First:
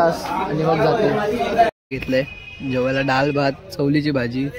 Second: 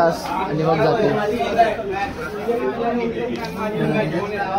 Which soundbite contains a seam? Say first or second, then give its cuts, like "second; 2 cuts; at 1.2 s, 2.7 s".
first; 1 cut; at 1.8 s